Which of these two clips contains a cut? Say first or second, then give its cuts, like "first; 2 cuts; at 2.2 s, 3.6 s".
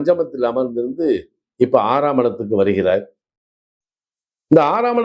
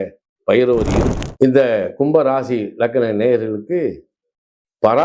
second; 1 cut; at 1.1 s